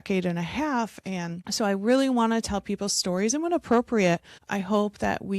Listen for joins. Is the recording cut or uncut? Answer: cut